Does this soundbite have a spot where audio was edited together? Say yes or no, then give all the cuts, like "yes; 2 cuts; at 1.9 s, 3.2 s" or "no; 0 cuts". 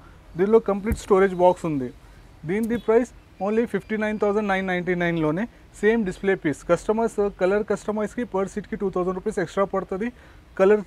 no; 0 cuts